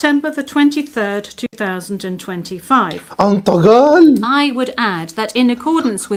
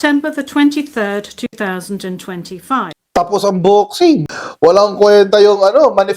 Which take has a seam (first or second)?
second